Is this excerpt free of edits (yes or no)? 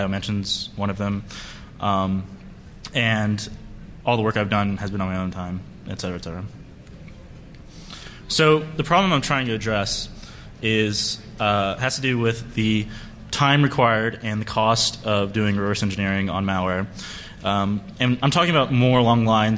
no